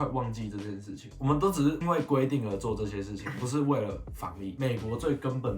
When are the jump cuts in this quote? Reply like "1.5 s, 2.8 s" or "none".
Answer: 1.0 s, 4.5 s